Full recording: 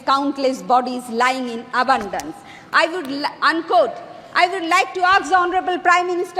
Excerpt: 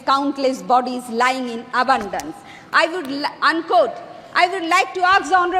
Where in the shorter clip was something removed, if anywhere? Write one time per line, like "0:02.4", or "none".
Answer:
none